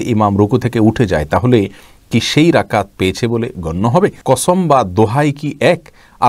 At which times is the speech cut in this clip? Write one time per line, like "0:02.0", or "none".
0:04.2